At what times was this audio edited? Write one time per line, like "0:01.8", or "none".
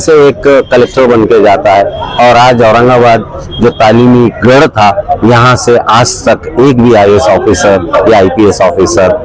none